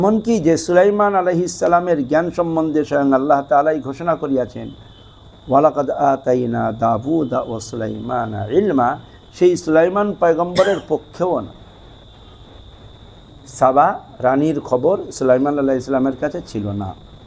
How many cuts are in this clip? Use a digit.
0